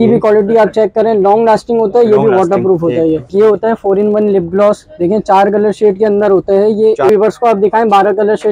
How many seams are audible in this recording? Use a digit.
2